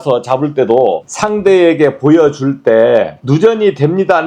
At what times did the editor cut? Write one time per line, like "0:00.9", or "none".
0:01.1
0:03.2

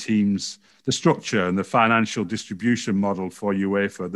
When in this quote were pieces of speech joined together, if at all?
none

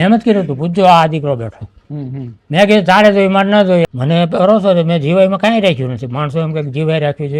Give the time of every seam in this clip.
0:03.9

